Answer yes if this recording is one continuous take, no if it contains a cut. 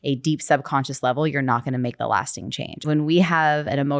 no